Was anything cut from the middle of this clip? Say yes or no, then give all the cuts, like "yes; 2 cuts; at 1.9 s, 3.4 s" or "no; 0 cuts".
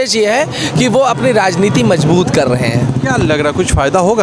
no; 0 cuts